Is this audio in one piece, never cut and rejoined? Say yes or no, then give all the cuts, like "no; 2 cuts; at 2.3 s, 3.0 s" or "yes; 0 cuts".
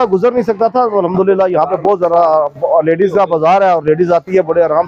yes; 0 cuts